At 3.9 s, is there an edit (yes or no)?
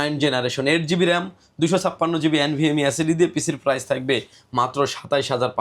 no